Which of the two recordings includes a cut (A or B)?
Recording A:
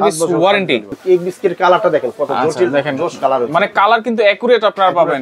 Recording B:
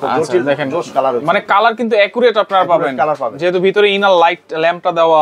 A